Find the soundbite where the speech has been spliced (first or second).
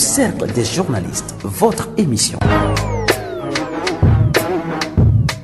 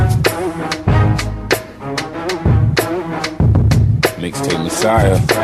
first